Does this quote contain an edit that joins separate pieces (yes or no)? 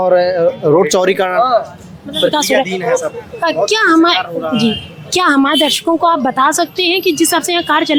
no